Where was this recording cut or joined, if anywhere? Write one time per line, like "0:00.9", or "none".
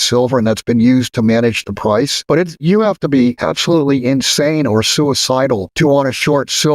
0:02.2
0:03.4
0:05.7